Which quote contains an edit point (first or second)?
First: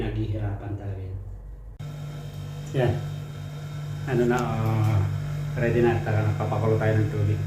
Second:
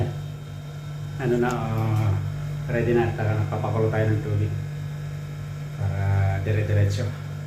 first